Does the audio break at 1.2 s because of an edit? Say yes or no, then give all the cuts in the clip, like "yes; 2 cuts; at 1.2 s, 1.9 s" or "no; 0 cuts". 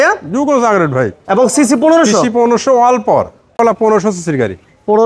no; 1 cut; at 3.5 s